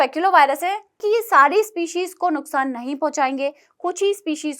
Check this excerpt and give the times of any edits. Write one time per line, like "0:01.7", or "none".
0:01.0